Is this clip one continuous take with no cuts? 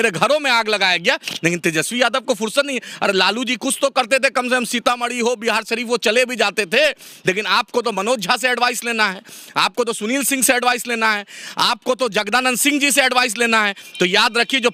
yes; 0 cuts

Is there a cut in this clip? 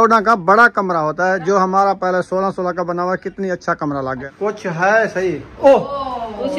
yes; 1 cut; at 4.2 s

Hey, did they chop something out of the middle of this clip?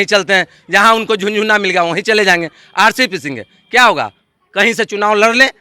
no; 0 cuts

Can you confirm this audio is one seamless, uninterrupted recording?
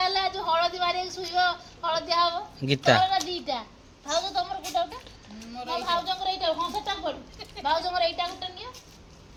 yes; 0 cuts

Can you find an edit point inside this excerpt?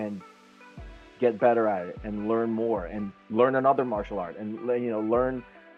no; 0 cuts

